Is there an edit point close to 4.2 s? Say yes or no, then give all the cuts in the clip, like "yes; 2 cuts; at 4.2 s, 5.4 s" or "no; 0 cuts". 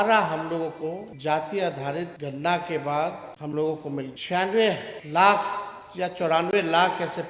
yes; 5 cuts; at 1.1 s, 2.2 s, 3.3 s, 4.2 s, 4.9 s